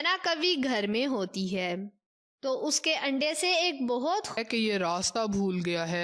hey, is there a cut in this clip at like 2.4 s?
no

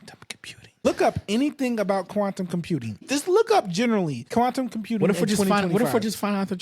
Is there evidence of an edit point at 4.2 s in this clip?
yes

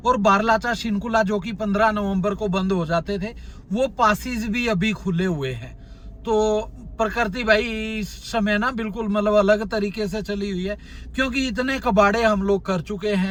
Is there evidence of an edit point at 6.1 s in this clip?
no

